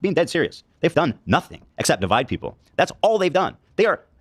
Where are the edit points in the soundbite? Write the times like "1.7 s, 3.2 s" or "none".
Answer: 0.9 s, 2.0 s